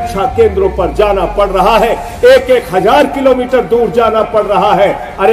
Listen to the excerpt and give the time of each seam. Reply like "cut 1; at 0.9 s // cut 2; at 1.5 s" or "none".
none